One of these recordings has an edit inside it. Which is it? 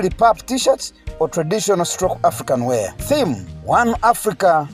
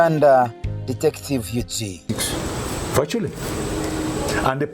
second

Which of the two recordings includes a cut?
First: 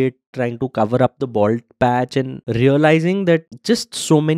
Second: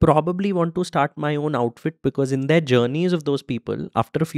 first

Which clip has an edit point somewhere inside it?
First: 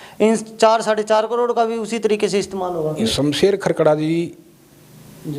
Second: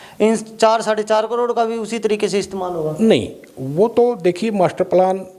first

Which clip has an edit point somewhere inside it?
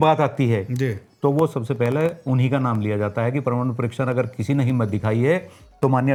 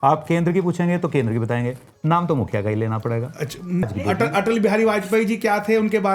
second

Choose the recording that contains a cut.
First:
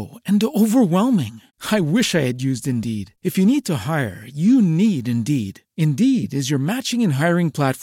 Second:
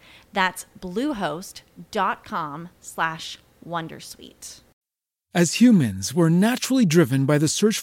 second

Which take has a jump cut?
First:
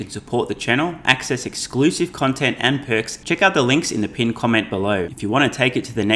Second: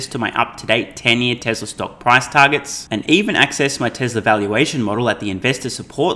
first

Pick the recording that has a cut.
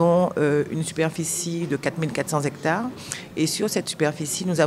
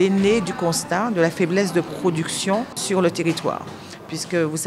second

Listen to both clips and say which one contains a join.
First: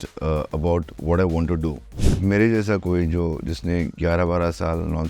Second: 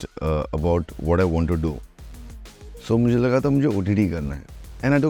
first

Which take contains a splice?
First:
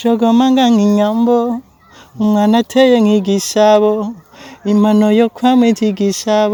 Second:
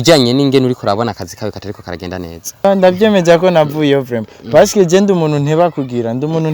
second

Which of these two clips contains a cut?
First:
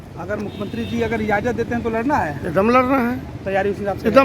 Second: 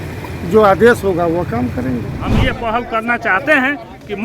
second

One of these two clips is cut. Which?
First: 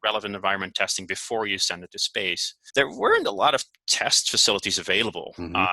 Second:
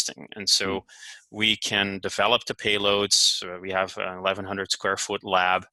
first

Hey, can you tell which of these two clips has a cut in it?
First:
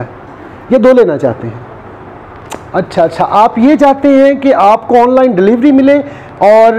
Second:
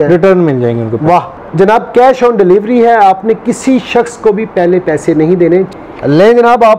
second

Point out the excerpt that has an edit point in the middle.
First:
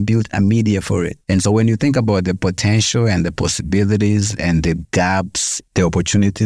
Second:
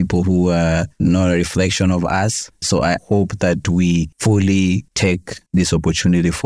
first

